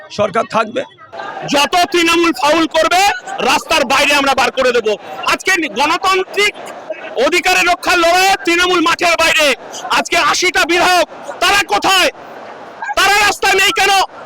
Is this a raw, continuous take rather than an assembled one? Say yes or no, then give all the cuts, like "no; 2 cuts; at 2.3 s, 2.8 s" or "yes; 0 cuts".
no; 1 cut; at 1.1 s